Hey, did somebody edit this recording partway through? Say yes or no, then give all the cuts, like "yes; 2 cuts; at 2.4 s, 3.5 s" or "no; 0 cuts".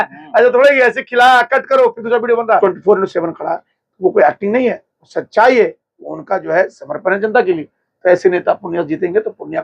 yes; 1 cut; at 2.6 s